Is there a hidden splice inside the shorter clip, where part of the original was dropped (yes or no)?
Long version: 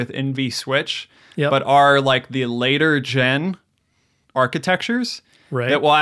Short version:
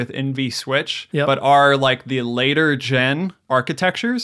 yes